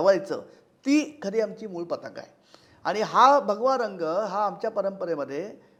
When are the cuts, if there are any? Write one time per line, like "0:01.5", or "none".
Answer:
none